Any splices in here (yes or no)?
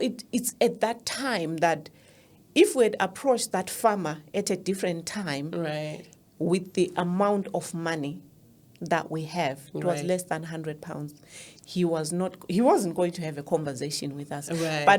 no